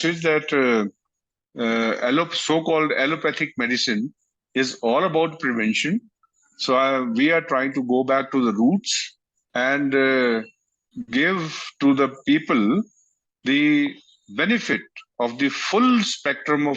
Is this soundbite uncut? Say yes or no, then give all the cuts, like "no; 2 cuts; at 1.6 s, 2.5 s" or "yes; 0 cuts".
yes; 0 cuts